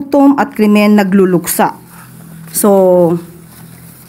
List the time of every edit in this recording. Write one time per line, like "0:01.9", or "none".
none